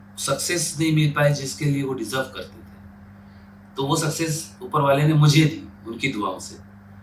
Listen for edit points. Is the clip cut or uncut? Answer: uncut